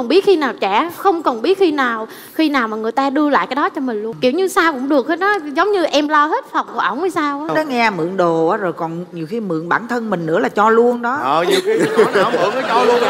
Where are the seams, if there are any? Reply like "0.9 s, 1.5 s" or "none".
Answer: none